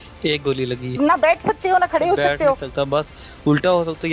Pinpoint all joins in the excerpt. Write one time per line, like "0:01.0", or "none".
0:01.0

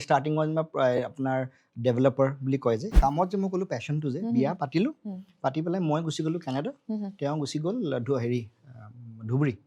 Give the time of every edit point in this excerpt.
0:02.9

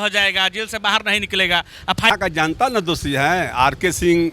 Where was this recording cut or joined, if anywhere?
0:02.1

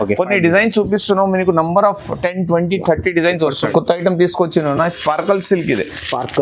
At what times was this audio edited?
0:03.7

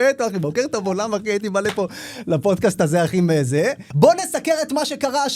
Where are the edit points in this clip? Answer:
0:03.8

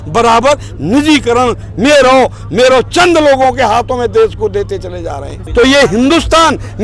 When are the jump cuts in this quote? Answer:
0:05.4

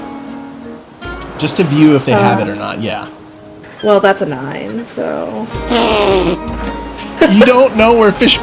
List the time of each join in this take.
0:01.4

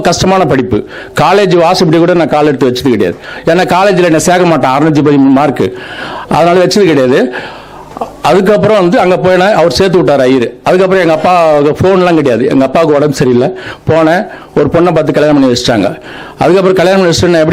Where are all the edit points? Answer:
none

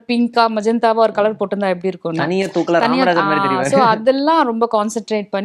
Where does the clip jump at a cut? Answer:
none

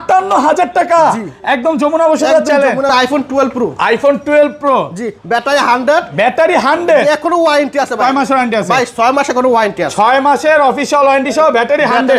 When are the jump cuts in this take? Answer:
0:02.9

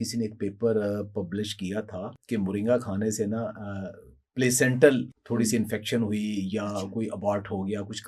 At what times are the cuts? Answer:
0:02.1
0:05.2

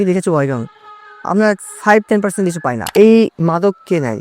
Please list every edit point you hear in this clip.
0:02.8

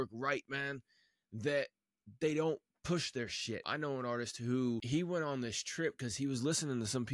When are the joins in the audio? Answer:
0:03.7
0:04.8

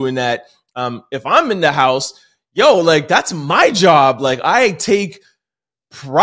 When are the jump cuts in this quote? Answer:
none

